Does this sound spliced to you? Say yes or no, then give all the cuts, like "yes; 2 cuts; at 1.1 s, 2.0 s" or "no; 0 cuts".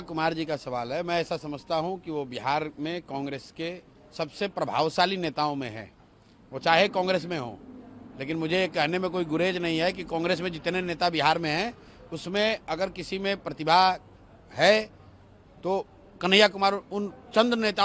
no; 0 cuts